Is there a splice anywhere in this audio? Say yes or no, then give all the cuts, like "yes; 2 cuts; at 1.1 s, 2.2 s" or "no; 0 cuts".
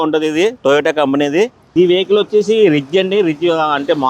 yes; 1 cut; at 1.6 s